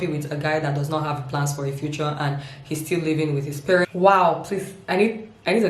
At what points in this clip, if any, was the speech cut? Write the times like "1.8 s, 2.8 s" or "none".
3.9 s